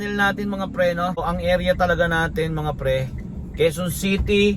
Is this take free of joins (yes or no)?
no